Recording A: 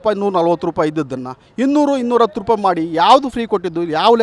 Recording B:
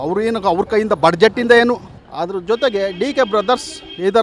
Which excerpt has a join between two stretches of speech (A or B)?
B